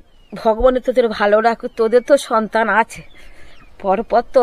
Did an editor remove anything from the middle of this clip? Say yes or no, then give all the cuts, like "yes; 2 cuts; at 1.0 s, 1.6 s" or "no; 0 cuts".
no; 0 cuts